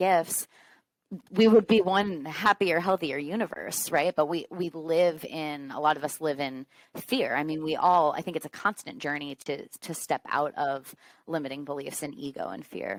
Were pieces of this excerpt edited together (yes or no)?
no